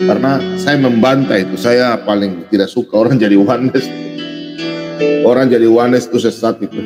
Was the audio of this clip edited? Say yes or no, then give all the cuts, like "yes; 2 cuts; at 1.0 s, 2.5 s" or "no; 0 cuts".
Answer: no; 0 cuts